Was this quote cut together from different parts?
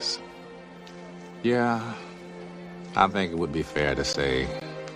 yes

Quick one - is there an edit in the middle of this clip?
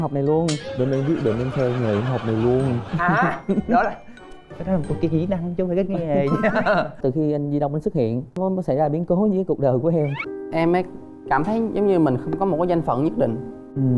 yes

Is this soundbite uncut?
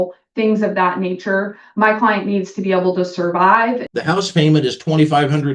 no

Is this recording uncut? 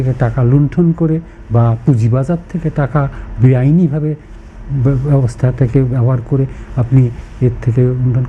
yes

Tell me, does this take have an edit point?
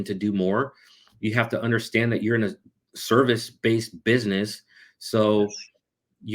no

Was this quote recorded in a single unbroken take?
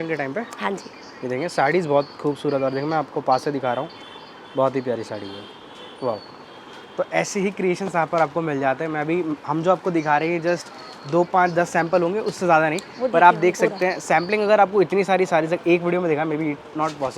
yes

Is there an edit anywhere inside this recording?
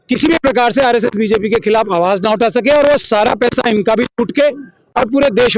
no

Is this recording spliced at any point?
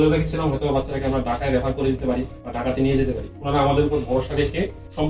no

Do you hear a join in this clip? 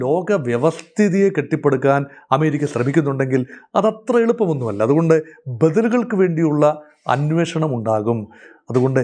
no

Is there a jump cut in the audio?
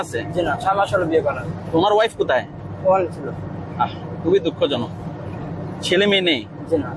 no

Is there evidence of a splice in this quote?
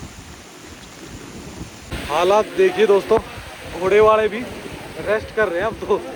no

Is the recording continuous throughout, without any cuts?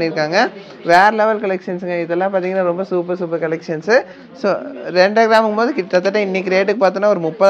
no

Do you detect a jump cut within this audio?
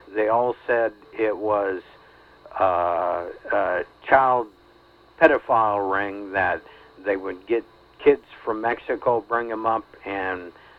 no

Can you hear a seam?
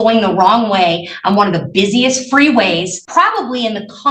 yes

